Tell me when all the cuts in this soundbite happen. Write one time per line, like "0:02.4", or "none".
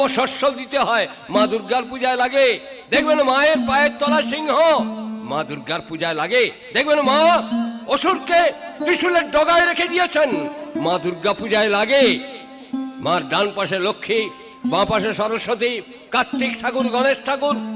none